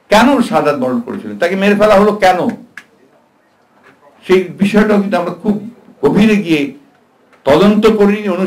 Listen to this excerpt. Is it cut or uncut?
uncut